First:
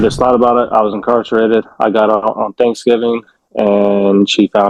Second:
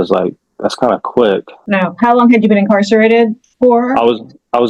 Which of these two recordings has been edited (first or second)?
second